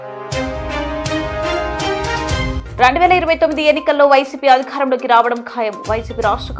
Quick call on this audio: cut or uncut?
cut